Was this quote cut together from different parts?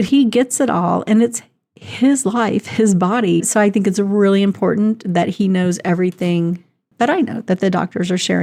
no; 0 cuts

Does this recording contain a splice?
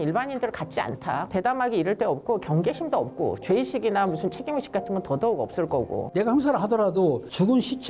yes; 2 cuts; at 1.2 s, 6.1 s

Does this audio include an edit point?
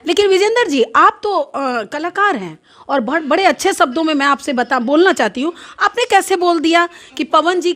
no; 0 cuts

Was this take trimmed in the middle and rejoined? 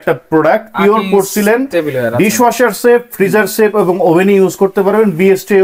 no; 0 cuts

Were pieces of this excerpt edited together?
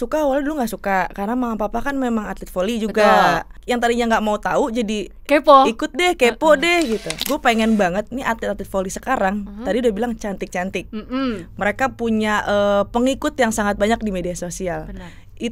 yes; 2 cuts; at 3.6 s, 7.1 s

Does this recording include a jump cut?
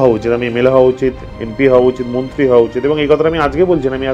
no; 0 cuts

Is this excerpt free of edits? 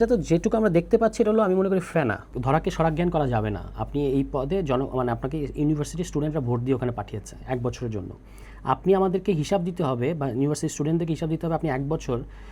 no; 1 cut; at 2.3 s

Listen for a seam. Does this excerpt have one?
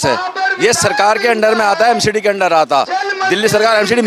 no; 0 cuts

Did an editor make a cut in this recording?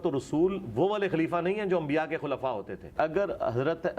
yes; 1 cut; at 2.9 s

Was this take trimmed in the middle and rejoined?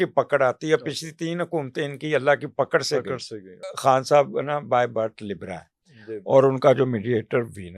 yes; 1 cut; at 3.6 s

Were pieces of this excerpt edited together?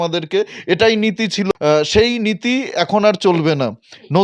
yes; 1 cut; at 1.5 s

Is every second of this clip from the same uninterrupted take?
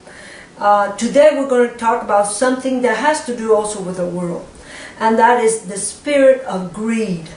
yes; 0 cuts

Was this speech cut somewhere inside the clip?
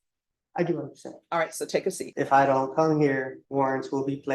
yes; 2 cuts; at 2.1 s, 3.4 s

